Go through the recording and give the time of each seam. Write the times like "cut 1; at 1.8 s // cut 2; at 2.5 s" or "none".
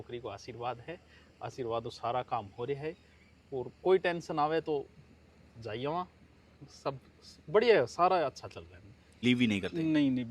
cut 1; at 9.2 s